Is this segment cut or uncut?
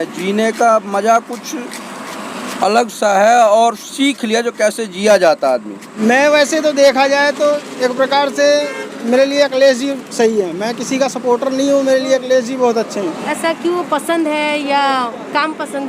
cut